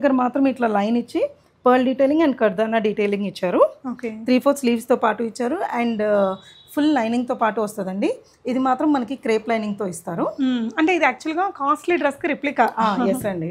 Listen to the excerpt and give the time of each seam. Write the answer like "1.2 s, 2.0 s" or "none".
none